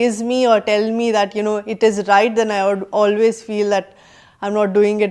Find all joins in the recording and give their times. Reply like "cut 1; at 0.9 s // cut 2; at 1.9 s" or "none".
none